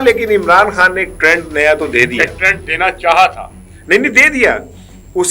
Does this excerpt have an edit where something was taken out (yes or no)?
no